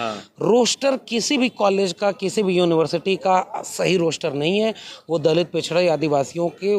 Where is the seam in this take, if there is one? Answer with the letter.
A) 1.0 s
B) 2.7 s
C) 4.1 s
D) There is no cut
D